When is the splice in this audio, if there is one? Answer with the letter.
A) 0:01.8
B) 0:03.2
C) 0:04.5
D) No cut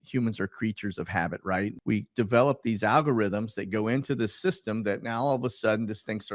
A